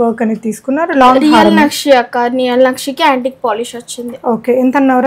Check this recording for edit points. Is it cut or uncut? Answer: uncut